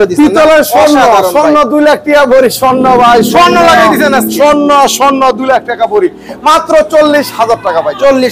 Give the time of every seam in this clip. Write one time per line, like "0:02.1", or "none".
none